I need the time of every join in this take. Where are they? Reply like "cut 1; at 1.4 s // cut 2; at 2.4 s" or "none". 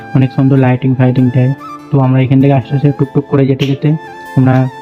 none